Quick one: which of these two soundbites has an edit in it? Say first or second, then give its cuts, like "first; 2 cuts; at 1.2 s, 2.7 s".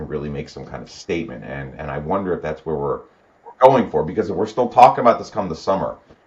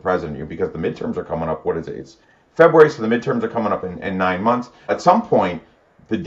second; 1 cut; at 4.9 s